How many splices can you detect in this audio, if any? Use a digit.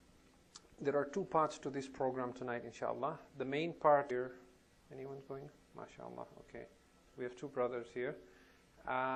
0